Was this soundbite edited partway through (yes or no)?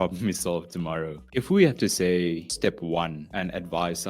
yes